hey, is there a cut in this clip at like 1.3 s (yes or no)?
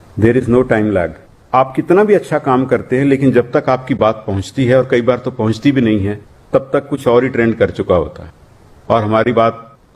yes